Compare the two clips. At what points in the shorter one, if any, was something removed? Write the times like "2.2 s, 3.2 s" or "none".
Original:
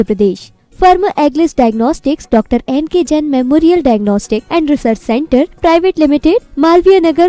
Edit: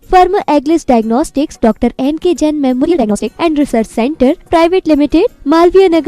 2.8 s